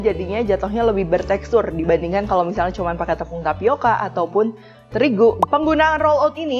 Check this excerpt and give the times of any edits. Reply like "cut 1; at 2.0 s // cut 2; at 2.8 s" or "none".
cut 1; at 5.4 s